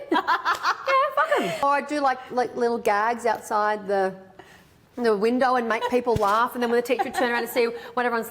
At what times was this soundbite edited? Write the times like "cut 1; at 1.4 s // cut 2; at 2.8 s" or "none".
cut 1; at 1.6 s